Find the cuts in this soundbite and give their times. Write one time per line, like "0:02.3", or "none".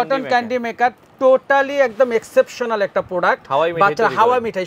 none

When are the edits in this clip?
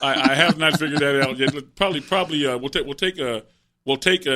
none

